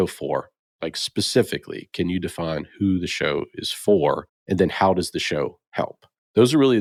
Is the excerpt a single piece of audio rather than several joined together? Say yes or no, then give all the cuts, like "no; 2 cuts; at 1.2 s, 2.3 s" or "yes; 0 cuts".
yes; 0 cuts